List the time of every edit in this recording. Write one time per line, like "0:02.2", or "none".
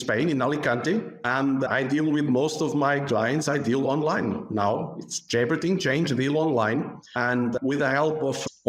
0:01.2
0:07.0